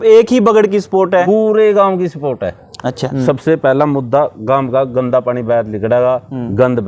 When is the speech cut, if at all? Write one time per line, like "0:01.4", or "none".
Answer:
0:01.2
0:03.1